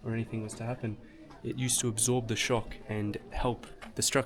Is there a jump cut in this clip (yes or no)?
no